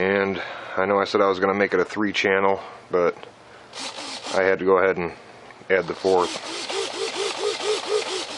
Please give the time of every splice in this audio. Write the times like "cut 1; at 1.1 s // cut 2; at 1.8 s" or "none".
cut 1; at 1.9 s